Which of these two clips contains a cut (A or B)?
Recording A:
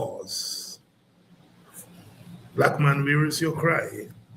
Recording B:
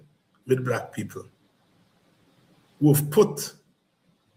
A